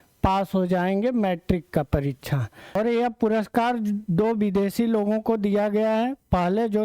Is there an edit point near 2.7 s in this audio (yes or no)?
yes